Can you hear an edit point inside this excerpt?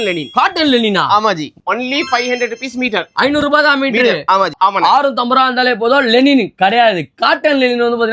yes; 2 cuts; at 1.5 s, 4.5 s

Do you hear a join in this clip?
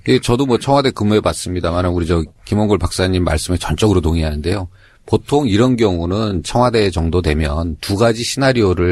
no; 0 cuts

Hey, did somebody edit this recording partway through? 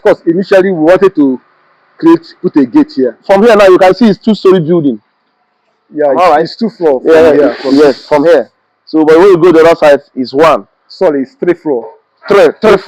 yes; 1 cut; at 3.2 s

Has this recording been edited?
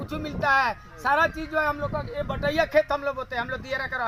no; 0 cuts

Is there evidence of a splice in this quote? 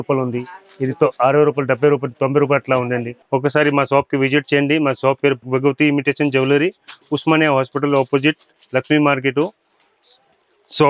no; 0 cuts

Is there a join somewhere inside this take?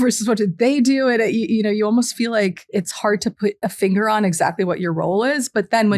yes; 2 cuts; at 2.6 s, 3.6 s

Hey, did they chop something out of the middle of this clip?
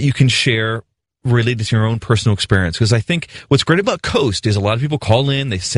yes; 1 cut; at 1.3 s

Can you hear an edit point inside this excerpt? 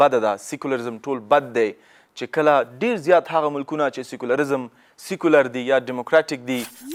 no; 0 cuts

